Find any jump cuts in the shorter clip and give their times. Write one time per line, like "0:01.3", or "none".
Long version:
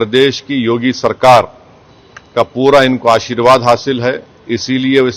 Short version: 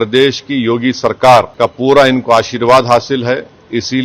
0:01.5